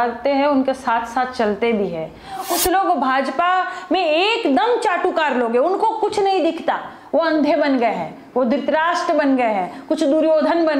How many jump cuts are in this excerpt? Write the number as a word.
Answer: one